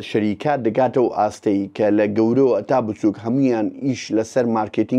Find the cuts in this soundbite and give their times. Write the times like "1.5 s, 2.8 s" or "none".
none

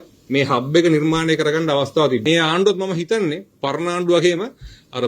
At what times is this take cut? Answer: 2.2 s

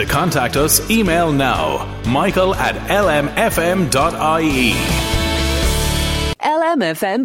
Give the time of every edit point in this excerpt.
6.3 s

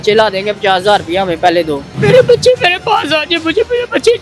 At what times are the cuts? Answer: 1.9 s

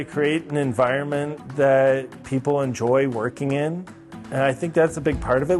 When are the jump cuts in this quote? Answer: none

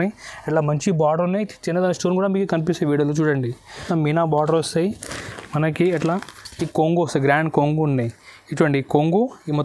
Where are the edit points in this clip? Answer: 3.9 s

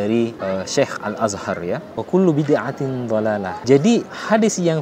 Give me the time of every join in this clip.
1.9 s, 3.5 s

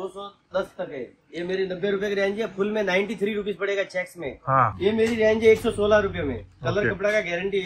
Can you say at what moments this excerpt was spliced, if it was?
4.7 s

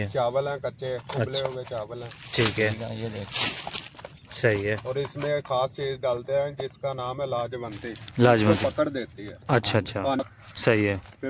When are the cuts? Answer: 10.2 s

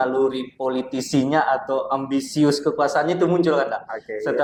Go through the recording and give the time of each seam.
none

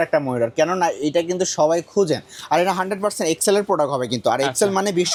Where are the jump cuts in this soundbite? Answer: none

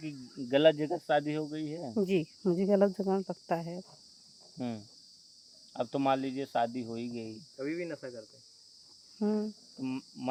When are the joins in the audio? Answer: none

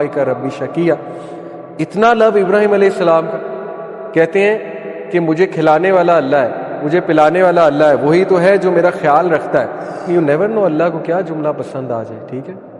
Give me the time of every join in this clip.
10.1 s

